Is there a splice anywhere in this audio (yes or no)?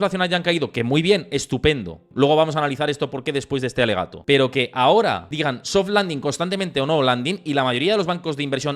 yes